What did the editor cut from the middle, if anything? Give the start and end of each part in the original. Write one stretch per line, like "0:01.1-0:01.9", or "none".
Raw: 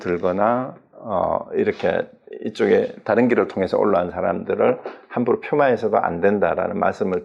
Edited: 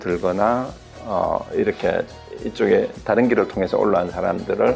none